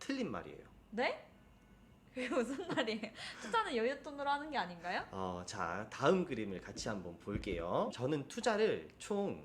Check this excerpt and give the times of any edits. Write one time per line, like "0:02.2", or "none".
none